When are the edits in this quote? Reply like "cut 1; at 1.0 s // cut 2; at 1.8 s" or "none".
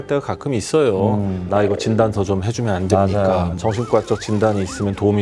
cut 1; at 1.4 s // cut 2; at 3.5 s